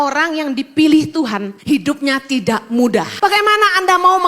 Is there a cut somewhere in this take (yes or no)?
yes